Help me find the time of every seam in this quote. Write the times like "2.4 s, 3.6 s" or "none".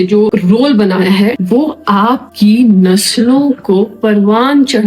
1.4 s, 2.3 s